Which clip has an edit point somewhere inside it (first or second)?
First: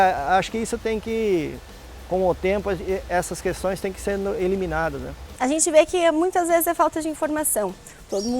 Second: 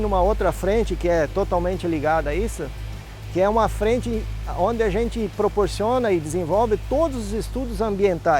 first